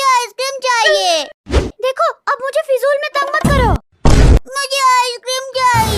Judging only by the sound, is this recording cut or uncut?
uncut